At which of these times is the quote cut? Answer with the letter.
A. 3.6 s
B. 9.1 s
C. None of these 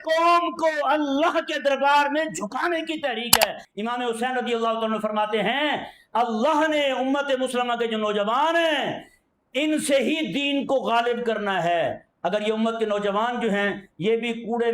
A